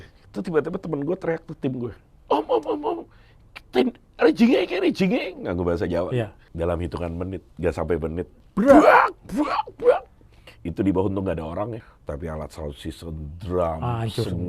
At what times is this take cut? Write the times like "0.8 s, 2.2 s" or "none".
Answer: 6.4 s, 8.4 s, 11.9 s